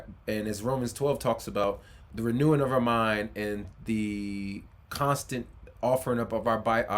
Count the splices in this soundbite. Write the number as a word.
one